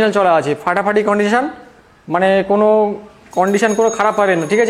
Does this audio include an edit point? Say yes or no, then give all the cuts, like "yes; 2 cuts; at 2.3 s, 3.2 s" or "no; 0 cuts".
no; 0 cuts